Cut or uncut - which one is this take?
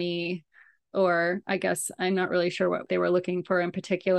cut